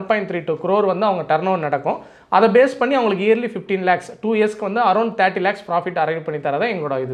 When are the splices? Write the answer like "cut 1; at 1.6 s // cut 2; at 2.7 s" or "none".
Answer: none